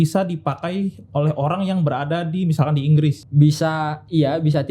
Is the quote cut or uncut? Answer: cut